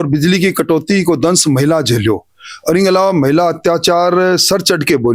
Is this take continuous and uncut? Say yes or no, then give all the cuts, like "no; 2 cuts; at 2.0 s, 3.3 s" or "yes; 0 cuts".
yes; 0 cuts